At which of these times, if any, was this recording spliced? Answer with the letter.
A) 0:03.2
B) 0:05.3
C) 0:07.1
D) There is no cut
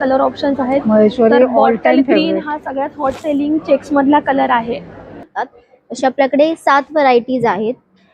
B